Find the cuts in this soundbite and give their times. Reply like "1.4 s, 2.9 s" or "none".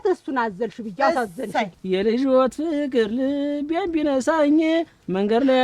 1.7 s